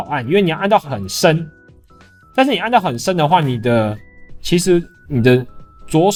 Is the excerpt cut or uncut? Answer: uncut